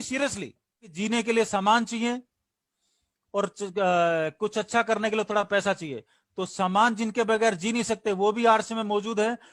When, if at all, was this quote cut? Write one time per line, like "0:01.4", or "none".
0:01.0